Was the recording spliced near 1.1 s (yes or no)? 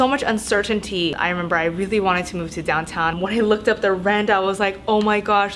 yes